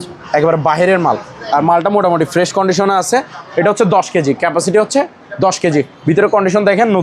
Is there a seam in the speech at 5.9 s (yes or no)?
yes